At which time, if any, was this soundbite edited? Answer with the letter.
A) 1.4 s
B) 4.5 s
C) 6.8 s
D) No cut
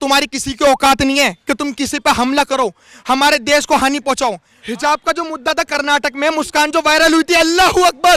B